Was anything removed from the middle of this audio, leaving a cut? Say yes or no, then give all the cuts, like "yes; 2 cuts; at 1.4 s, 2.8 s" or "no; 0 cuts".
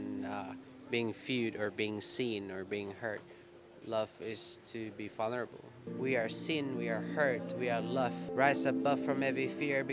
yes; 1 cut; at 5.8 s